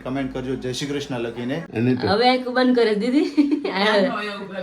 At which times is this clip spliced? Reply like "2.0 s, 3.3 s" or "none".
1.7 s